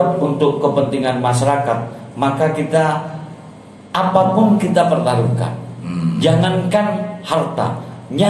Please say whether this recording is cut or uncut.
uncut